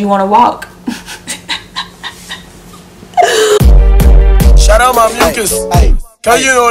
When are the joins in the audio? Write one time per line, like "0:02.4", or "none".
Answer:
0:03.6